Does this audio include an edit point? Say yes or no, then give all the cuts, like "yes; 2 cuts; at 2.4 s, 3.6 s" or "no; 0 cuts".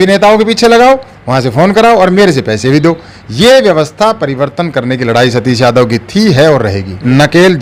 no; 0 cuts